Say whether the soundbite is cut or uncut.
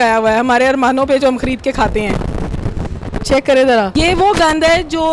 cut